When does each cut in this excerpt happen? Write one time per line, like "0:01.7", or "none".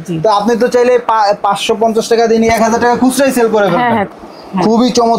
0:04.1